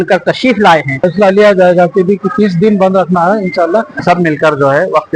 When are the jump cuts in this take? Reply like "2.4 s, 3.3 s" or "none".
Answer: 1.1 s, 4.0 s

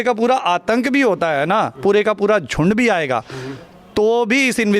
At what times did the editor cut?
none

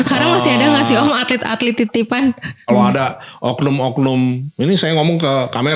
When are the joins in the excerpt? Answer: 2.6 s

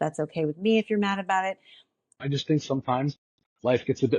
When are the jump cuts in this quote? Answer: 2.2 s

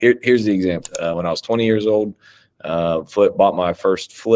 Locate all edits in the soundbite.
0.9 s

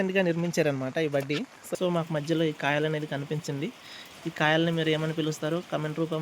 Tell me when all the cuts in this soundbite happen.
1.6 s

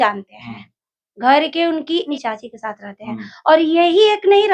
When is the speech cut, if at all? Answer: 2.1 s

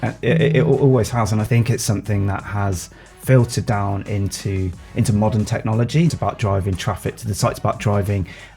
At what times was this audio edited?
1.5 s, 6.1 s

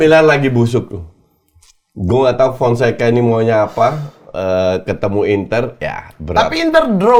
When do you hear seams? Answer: none

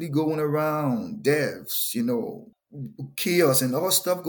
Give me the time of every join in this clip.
2.5 s

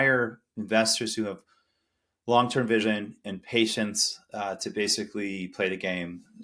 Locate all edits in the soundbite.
none

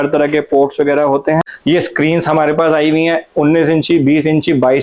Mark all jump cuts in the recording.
1.5 s

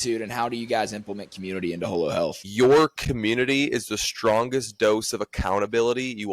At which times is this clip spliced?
2.4 s

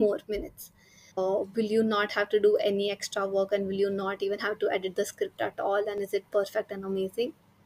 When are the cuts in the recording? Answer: 1.1 s

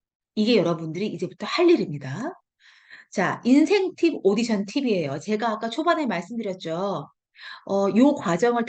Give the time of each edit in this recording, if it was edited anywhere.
none

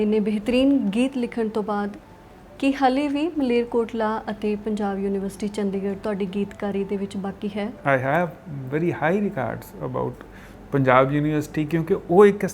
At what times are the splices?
7.8 s

